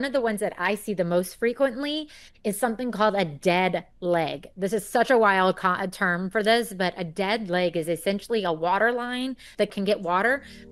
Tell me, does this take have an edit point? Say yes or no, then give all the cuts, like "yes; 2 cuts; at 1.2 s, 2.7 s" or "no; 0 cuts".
no; 0 cuts